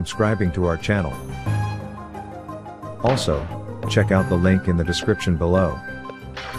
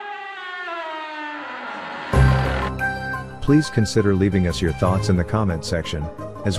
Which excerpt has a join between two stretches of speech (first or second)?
second